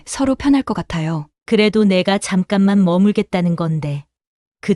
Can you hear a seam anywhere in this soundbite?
yes; 1 cut; at 1.3 s

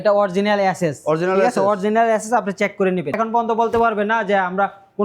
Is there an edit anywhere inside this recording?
yes; 1 cut; at 3.1 s

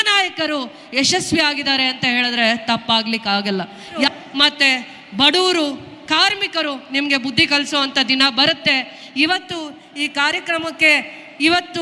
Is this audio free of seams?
no; 1 cut; at 4.1 s

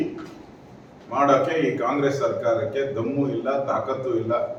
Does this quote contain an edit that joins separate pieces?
no; 0 cuts

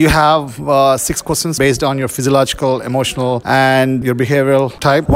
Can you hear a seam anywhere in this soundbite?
yes; 1 cut; at 1.6 s

